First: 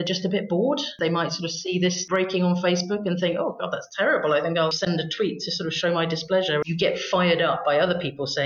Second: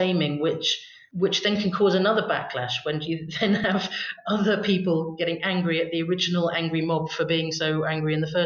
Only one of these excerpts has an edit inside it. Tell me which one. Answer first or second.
first